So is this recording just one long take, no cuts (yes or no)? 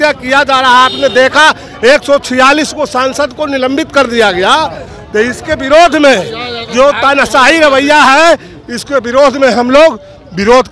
yes